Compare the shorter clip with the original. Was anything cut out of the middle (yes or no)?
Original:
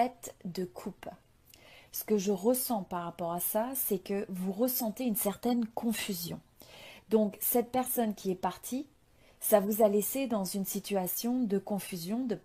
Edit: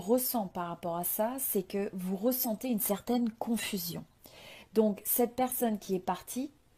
no